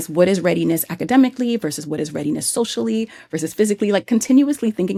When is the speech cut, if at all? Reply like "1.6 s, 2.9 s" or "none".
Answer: none